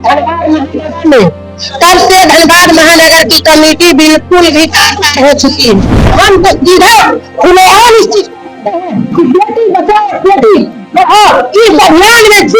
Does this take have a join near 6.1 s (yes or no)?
yes